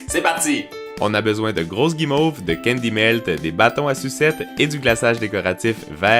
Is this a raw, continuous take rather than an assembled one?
yes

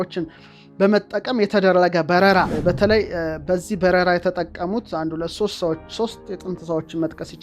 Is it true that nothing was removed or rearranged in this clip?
no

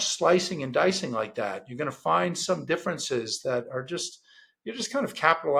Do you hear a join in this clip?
no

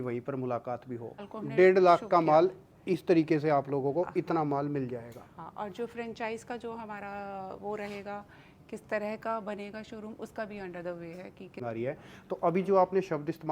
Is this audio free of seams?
no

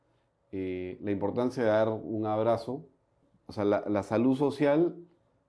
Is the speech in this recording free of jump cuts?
no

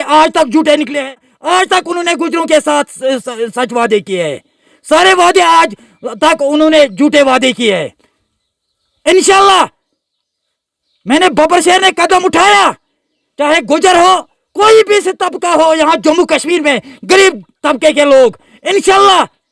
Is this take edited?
yes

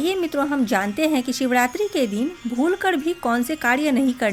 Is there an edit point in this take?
no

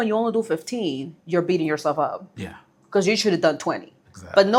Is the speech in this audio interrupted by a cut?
no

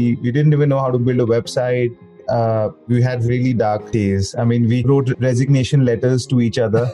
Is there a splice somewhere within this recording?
yes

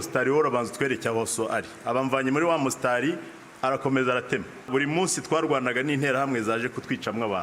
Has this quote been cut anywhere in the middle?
yes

